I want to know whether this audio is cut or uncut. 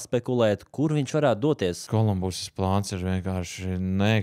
cut